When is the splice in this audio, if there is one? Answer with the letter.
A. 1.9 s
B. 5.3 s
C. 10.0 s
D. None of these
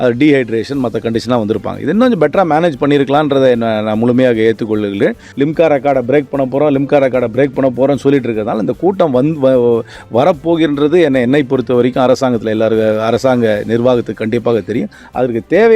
B